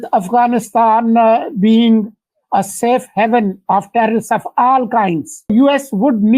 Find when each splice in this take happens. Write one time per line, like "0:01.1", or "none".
0:05.5